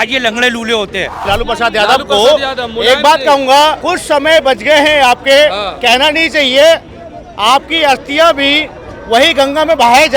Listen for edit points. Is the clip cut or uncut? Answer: cut